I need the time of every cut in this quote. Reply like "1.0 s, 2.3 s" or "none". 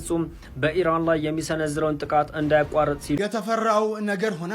3.2 s